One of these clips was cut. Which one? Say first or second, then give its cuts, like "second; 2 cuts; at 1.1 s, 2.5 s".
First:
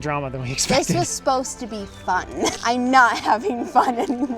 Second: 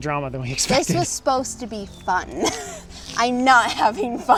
first; 1 cut; at 2.6 s